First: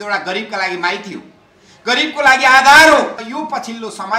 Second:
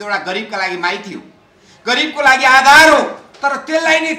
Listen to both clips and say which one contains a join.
first; 1 cut; at 3.3 s

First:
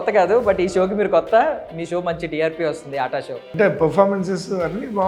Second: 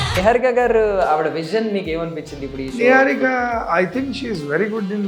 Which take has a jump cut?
first; 1 cut; at 3.4 s

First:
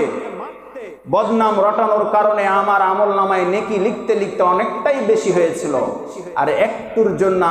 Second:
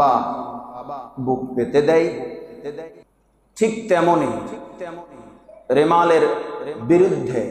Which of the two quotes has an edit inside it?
second; 1 cut; at 2.9 s

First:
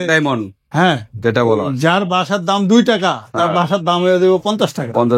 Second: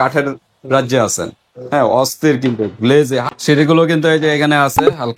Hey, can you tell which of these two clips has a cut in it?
second; 1 cut; at 3.2 s

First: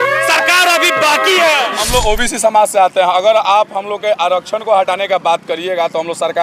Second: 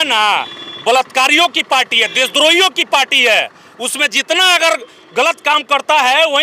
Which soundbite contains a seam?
first; 1 cut; at 1.7 s

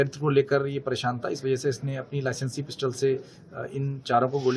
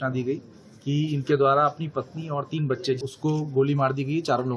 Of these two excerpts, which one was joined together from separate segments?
second; 1 cut; at 3.1 s

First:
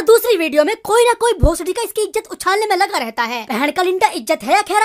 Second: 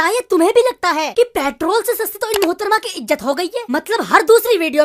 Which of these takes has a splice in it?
first; 1 cut; at 3.4 s

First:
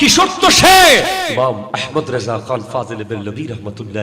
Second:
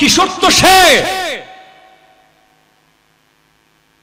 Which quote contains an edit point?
first; 1 cut; at 1.3 s

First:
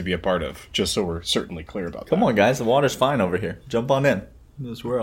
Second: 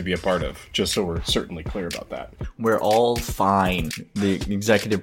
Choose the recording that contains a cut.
second; 2 cuts; at 2.1 s, 4.0 s

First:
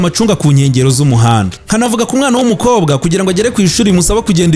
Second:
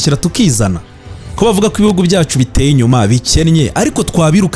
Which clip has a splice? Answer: second; 1 cut; at 1.3 s

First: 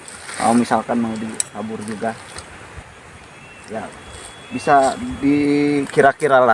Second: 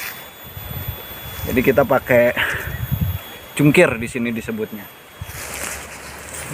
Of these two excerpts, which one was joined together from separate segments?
second; 1 cut; at 5.4 s

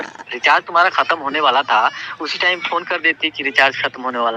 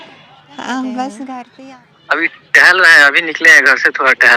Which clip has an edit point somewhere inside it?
second; 1 cut; at 1.5 s

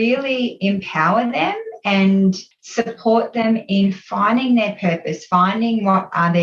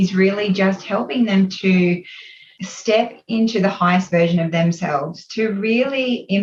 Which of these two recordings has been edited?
first; 1 cut; at 2.5 s

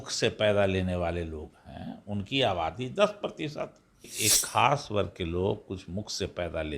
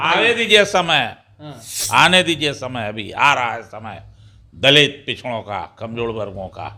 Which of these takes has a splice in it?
first; 1 cut; at 4.1 s

